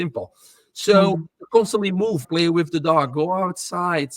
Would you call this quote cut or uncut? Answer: cut